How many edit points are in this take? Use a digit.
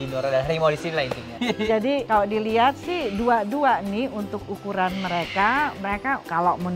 1